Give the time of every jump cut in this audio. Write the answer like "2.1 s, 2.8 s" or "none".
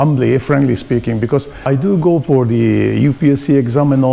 1.7 s